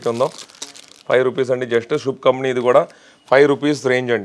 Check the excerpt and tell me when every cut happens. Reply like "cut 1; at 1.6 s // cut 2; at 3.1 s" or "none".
none